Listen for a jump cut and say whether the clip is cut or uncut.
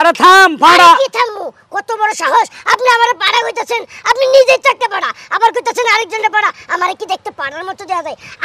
uncut